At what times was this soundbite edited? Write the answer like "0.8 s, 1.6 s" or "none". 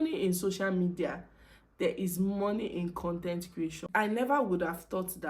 3.8 s